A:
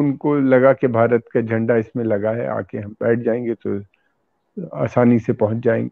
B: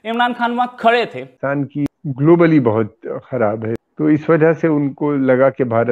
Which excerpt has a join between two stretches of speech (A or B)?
B